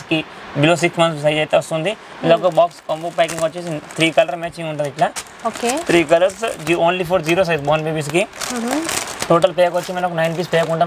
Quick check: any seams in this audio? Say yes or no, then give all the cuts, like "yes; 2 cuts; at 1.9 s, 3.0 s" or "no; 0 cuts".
no; 0 cuts